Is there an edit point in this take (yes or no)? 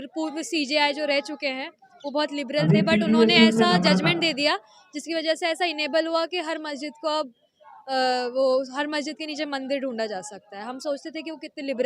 no